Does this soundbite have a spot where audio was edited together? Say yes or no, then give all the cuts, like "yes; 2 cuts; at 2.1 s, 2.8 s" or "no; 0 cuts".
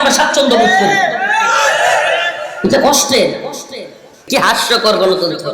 yes; 1 cut; at 4.1 s